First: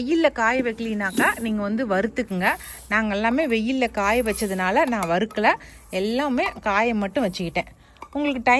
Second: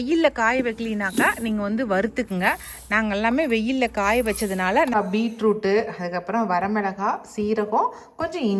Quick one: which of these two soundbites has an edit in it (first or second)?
second